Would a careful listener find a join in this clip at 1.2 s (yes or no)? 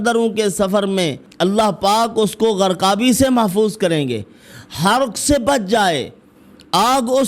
yes